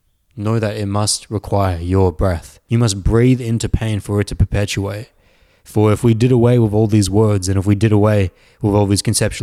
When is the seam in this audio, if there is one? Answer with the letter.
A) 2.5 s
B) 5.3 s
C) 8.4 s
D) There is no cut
A